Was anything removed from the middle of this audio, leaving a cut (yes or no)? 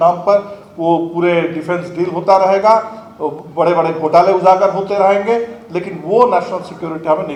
no